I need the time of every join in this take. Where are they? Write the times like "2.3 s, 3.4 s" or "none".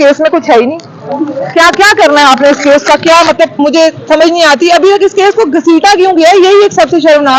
none